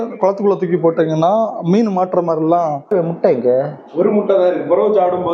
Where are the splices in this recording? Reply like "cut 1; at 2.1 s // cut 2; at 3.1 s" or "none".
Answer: cut 1; at 2.8 s

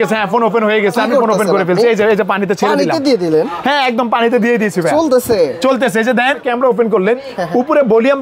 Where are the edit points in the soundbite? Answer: cut 1; at 6.4 s

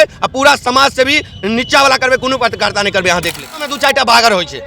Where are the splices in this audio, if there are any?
cut 1; at 3.7 s

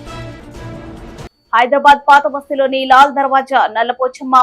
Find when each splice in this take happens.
cut 1; at 1.3 s

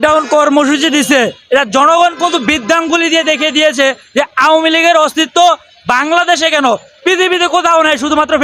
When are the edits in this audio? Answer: none

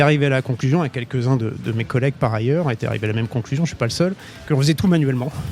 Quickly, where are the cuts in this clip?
cut 1; at 4.3 s

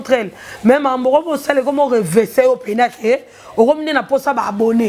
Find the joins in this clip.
none

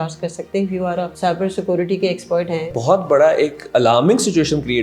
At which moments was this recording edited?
cut 1; at 1.1 s // cut 2; at 2.7 s

